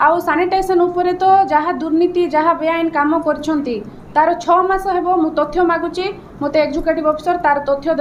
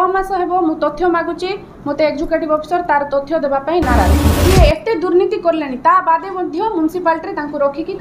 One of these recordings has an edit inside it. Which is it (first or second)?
second